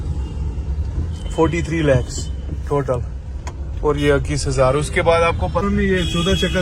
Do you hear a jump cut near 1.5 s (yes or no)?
no